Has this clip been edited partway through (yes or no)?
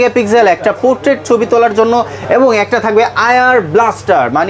no